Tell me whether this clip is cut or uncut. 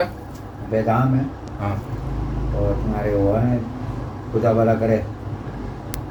uncut